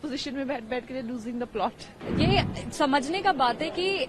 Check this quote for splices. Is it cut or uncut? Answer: cut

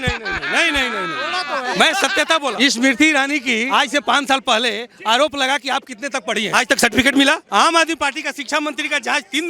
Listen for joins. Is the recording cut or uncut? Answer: cut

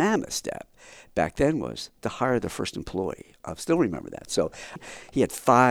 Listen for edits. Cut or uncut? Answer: cut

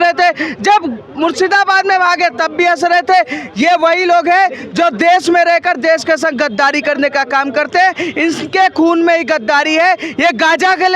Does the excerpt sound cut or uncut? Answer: uncut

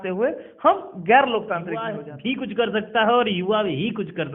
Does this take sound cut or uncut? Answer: cut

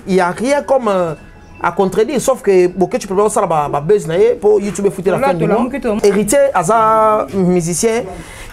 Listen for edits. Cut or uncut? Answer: cut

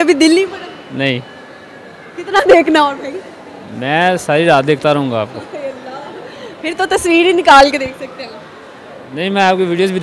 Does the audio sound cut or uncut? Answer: uncut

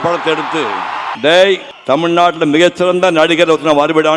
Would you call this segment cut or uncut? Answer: cut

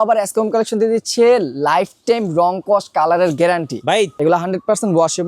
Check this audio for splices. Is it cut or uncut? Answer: cut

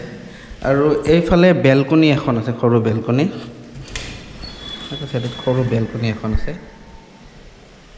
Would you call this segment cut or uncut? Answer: uncut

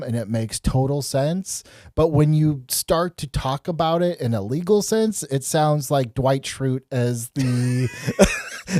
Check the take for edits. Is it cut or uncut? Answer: uncut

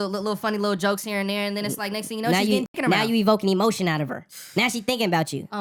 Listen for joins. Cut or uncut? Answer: uncut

